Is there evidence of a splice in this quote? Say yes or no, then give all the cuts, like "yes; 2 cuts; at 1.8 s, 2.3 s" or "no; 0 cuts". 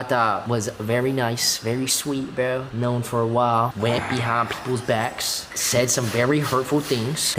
no; 0 cuts